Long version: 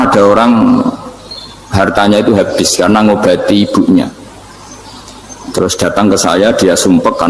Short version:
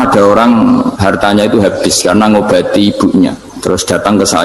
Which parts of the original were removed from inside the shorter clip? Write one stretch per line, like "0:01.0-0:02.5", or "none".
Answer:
0:01.0-0:01.7
0:04.2-0:05.4

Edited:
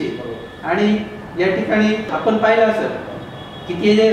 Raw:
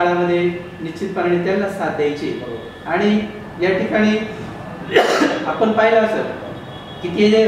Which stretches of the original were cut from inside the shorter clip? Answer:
0:04.3-0:05.5

